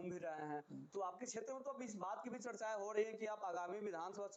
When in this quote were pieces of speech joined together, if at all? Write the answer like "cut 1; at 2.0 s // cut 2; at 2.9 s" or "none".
none